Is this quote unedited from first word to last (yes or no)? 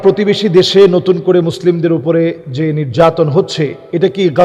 yes